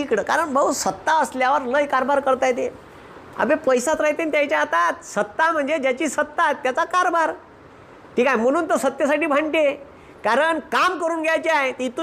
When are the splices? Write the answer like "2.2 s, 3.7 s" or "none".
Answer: none